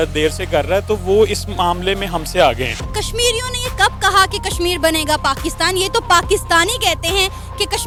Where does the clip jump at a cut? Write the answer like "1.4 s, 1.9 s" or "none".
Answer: none